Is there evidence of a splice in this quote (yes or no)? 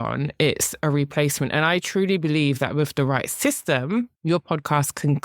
yes